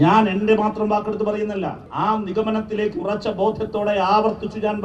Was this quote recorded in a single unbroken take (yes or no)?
no